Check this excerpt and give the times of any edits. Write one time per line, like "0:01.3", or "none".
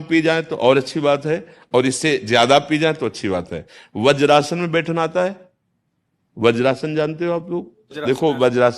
none